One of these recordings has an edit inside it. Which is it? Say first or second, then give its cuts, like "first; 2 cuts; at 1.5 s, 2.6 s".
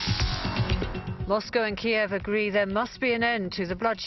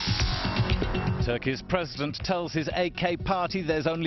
second; 1 cut; at 0.9 s